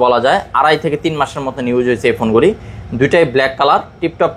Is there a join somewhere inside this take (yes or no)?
no